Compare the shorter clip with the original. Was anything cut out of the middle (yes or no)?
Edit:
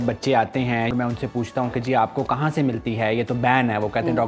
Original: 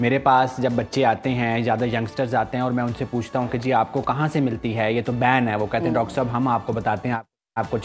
yes